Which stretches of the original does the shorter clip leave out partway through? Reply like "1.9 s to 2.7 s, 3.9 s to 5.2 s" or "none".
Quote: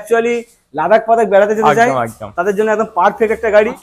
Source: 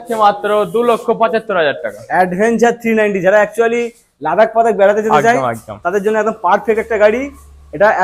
none